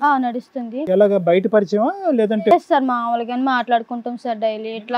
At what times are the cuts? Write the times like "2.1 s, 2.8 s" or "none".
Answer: none